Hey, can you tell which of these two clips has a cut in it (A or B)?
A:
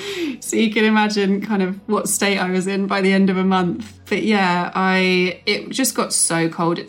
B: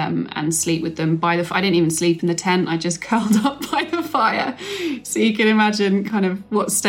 A